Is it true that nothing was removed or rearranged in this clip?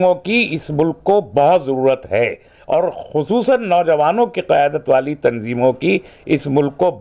yes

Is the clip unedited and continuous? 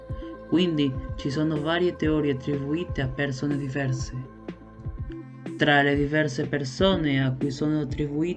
no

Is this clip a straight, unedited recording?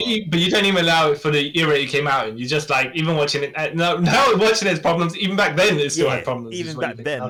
yes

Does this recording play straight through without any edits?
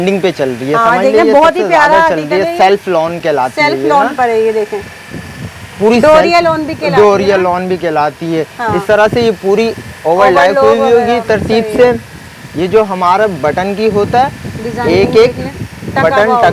yes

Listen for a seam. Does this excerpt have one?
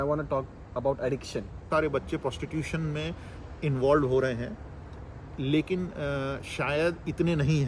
yes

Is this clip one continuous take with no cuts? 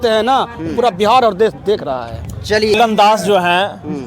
no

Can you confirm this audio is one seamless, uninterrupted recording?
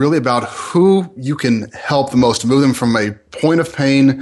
yes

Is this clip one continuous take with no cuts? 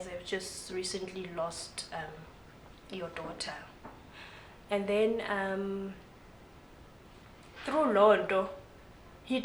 yes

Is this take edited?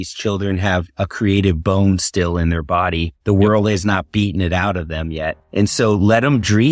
no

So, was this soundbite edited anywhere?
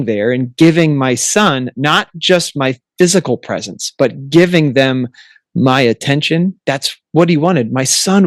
no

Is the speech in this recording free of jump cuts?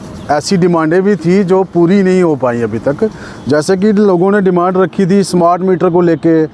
yes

